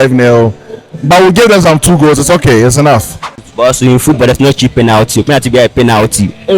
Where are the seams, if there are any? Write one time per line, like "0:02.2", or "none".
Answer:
0:03.5